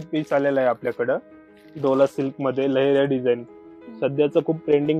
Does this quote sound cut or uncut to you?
uncut